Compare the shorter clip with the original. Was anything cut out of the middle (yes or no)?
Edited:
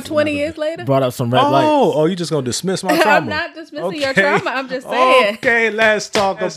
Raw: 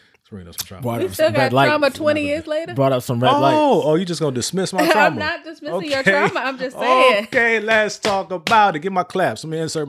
no